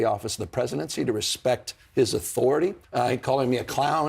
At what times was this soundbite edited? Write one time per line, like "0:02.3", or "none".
0:02.8